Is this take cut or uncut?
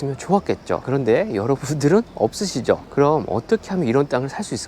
cut